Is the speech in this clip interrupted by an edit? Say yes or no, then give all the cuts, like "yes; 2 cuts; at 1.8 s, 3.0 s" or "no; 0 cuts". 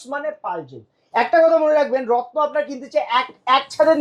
no; 0 cuts